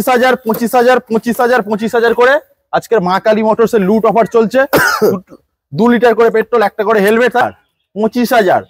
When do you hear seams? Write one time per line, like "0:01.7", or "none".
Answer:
0:07.4